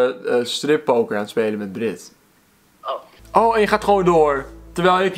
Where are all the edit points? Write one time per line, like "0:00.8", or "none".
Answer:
0:03.1